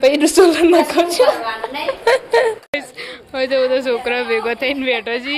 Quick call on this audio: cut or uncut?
cut